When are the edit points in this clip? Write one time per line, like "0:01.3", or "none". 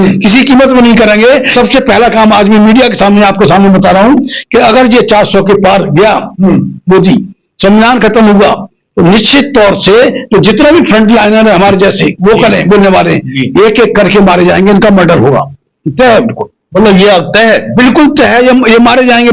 0:01.5